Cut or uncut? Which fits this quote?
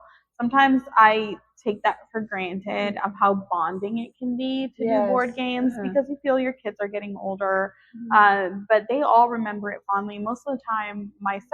uncut